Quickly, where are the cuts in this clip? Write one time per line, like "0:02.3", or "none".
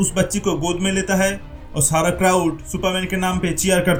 none